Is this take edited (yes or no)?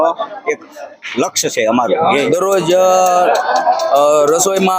yes